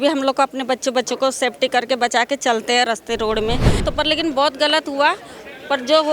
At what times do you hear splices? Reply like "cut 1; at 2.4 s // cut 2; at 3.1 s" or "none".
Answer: cut 1; at 3.7 s